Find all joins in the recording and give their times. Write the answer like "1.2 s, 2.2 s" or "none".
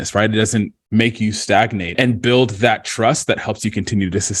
1.9 s

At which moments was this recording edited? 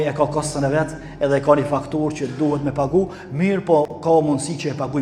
none

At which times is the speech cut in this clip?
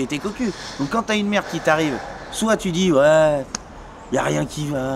none

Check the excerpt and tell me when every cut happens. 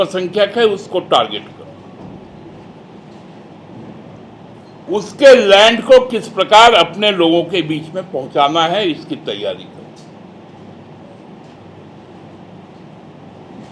none

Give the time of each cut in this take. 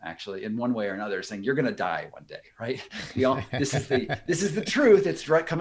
none

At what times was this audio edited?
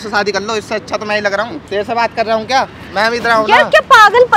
1.7 s

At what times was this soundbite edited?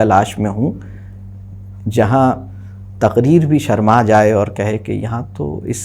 none

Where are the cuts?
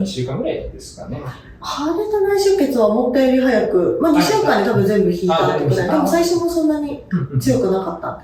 none

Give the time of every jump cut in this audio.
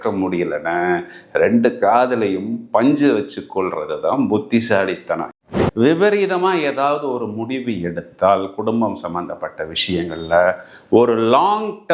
5.4 s

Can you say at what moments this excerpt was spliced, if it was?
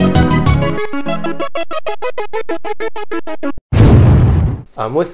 none

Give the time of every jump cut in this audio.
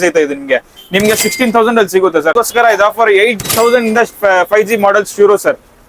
2.3 s

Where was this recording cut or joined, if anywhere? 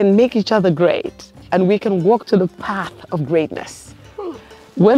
none

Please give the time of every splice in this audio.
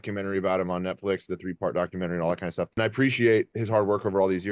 2.7 s, 3.6 s

